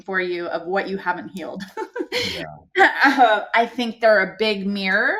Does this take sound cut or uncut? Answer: uncut